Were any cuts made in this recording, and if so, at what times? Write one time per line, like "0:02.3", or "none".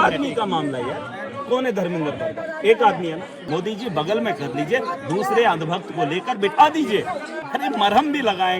0:03.3
0:07.3